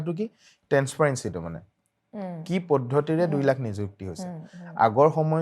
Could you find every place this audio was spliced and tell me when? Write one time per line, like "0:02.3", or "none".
none